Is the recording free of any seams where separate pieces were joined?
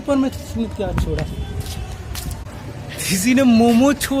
no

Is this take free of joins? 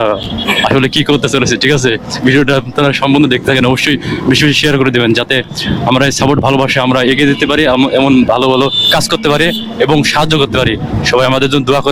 yes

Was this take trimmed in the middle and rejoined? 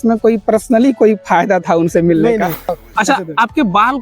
yes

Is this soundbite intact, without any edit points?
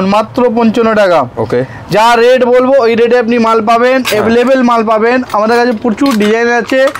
yes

